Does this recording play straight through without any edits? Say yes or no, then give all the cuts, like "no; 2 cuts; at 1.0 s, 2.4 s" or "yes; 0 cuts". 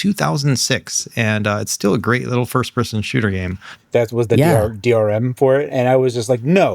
no; 1 cut; at 3.7 s